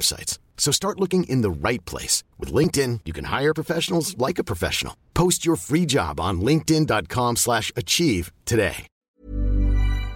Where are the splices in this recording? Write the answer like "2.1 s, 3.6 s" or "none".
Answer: 9.1 s

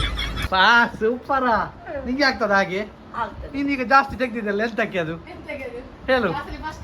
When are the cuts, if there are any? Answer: none

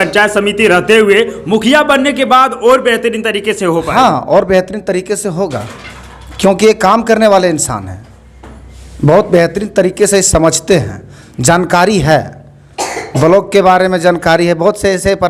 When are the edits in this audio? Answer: none

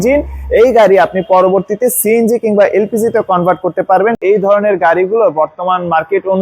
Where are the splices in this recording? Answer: 4.2 s

